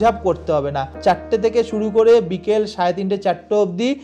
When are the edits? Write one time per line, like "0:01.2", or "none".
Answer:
0:01.0